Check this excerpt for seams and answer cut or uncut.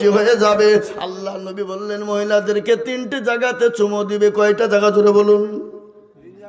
uncut